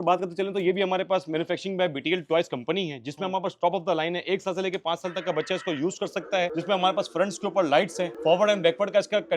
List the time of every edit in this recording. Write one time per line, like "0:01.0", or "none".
0:06.5
0:08.1